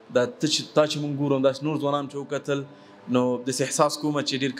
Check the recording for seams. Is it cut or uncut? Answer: uncut